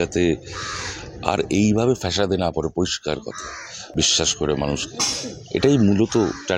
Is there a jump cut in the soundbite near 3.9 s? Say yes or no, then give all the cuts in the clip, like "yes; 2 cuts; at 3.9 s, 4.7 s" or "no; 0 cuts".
no; 0 cuts